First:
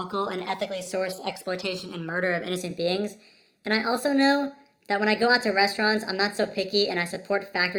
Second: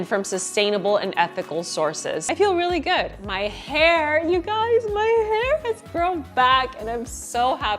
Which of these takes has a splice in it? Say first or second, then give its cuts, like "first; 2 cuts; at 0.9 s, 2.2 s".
second; 1 cut; at 2.2 s